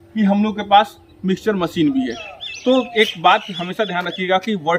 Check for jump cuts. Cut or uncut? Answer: uncut